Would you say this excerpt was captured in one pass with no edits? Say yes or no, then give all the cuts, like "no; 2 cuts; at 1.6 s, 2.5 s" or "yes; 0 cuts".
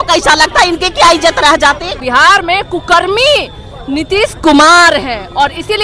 no; 1 cut; at 1.9 s